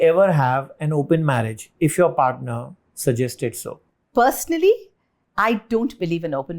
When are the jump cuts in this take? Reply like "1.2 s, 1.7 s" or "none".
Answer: 3.9 s

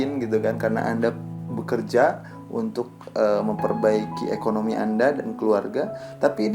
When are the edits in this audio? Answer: none

